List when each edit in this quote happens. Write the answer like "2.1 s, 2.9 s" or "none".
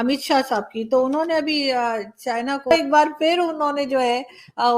2.7 s